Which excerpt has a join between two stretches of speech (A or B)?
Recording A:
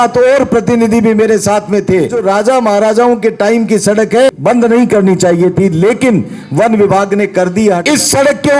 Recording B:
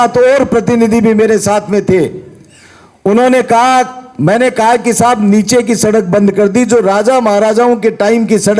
A